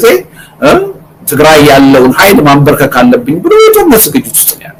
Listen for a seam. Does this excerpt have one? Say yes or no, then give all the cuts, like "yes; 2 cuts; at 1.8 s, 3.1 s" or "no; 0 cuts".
no; 0 cuts